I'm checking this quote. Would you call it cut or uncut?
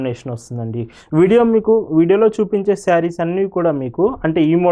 uncut